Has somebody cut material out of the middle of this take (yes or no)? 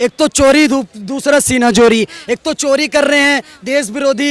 no